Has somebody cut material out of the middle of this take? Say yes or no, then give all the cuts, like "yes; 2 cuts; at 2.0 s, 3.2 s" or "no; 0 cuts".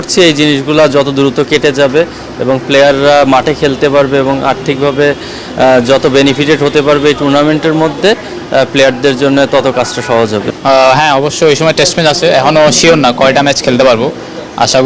yes; 1 cut; at 10.6 s